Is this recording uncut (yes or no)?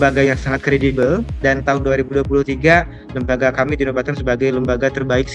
yes